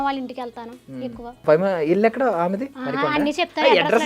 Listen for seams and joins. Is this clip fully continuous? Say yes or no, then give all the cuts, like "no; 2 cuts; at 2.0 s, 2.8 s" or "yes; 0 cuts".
no; 2 cuts; at 1.4 s, 2.8 s